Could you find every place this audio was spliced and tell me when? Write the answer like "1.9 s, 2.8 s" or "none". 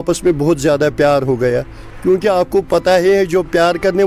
none

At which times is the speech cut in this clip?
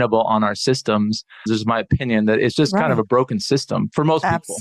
1.4 s

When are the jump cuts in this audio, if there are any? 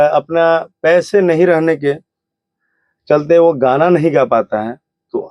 none

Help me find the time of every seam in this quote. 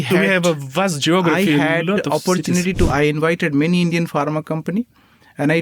2.9 s

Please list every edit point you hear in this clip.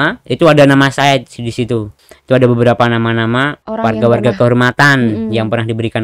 2.0 s, 3.6 s

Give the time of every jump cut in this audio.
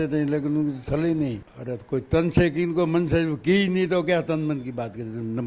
1.5 s

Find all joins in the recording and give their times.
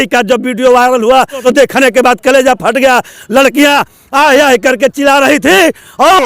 1.4 s

